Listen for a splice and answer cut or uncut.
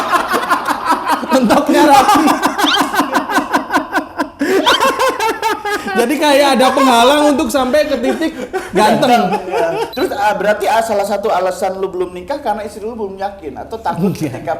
cut